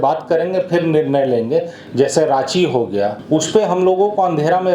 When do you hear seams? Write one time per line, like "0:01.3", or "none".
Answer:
0:01.8
0:03.2